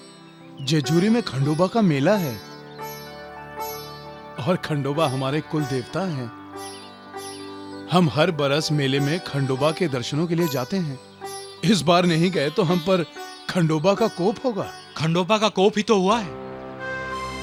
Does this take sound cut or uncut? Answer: uncut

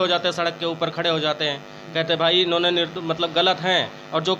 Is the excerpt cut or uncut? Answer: uncut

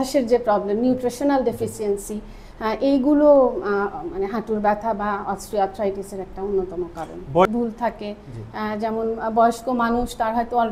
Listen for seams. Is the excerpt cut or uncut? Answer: cut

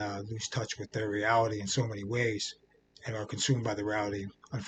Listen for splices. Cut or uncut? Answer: uncut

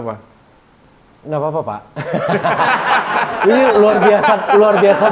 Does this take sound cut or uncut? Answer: uncut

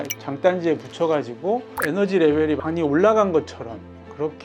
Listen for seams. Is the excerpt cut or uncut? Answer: uncut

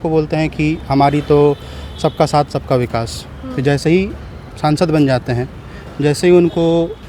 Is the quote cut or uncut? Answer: uncut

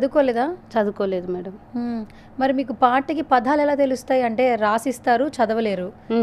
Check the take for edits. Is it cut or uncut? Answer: uncut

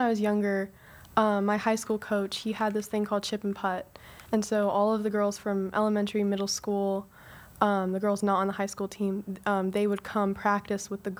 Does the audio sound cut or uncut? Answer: uncut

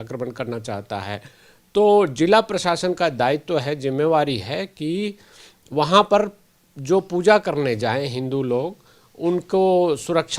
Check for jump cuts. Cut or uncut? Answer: uncut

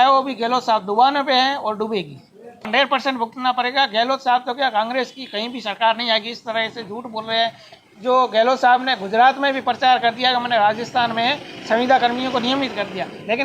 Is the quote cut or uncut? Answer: cut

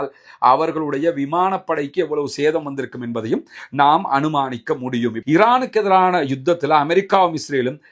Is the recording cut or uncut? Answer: cut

